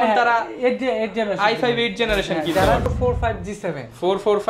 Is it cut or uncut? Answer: cut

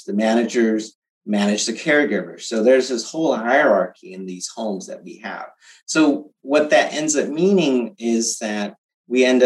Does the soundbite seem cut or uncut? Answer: uncut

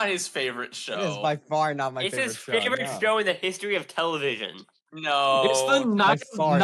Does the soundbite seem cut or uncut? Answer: uncut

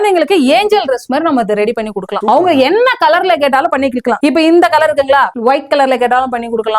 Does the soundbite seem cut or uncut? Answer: uncut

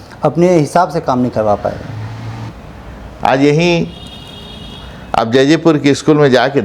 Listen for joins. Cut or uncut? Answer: cut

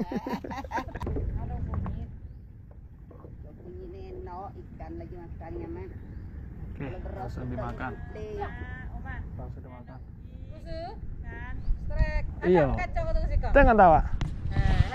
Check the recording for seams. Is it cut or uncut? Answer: cut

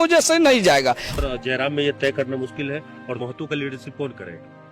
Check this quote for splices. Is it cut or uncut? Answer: cut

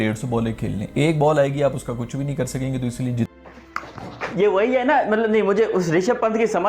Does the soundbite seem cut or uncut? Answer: cut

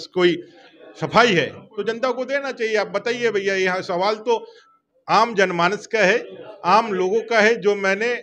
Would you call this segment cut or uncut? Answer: uncut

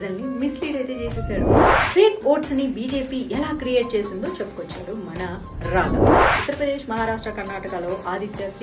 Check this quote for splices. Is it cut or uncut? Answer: cut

